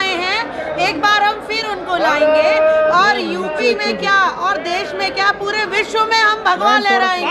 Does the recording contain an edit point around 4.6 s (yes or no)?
no